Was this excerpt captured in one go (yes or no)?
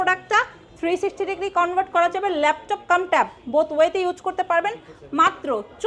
yes